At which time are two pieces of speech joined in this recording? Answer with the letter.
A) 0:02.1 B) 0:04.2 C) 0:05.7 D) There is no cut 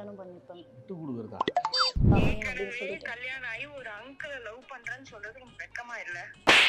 A